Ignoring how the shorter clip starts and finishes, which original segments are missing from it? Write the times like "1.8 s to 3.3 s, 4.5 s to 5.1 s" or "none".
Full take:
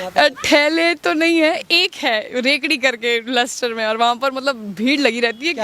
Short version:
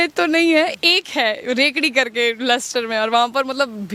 none